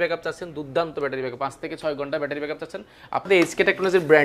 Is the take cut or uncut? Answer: cut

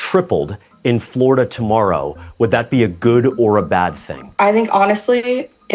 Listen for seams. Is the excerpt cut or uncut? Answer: cut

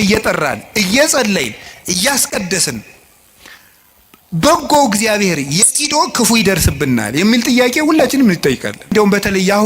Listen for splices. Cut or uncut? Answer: cut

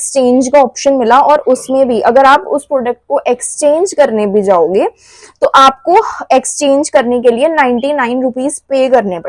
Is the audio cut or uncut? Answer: uncut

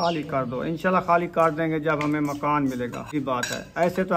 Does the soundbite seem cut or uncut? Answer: cut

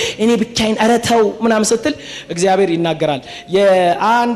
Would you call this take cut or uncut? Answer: uncut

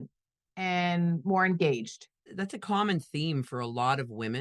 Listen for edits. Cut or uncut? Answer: cut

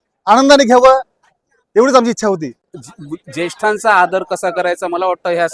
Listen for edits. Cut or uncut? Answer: cut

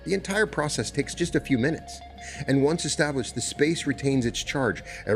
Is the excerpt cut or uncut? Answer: uncut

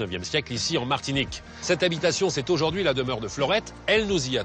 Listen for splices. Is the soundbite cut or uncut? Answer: cut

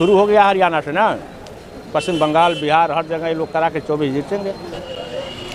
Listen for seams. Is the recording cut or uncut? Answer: uncut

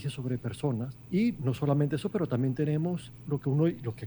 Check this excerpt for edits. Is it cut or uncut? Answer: cut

